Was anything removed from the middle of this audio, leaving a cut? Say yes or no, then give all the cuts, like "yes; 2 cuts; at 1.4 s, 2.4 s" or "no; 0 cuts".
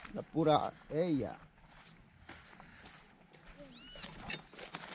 yes; 1 cut; at 3.6 s